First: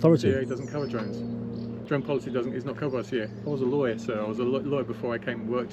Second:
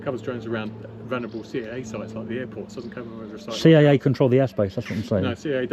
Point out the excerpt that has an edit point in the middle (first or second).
first